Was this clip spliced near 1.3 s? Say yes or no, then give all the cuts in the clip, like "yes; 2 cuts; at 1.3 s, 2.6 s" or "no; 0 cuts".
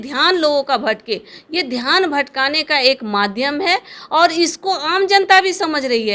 no; 0 cuts